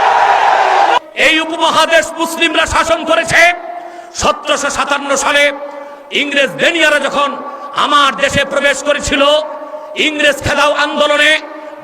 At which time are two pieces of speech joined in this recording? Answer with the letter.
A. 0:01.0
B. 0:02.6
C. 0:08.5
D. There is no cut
A